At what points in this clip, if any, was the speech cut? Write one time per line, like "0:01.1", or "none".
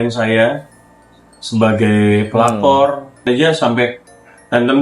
0:03.3